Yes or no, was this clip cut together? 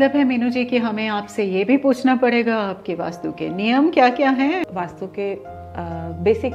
yes